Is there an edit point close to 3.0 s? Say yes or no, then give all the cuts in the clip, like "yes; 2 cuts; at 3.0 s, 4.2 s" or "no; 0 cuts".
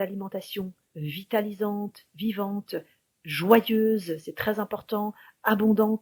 no; 0 cuts